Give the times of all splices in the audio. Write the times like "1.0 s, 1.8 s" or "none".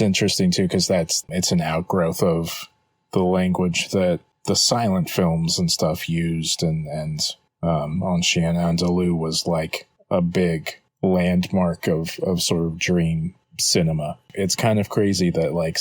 1.2 s, 14.3 s